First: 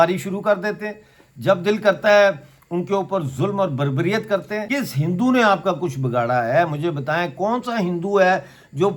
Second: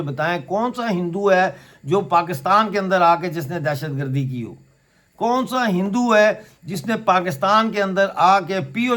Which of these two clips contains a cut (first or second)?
first